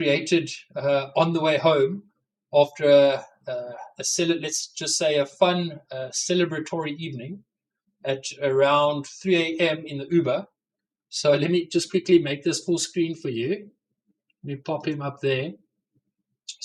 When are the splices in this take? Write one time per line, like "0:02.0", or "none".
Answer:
none